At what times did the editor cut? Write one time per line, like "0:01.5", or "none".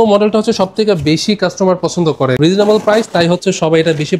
0:02.4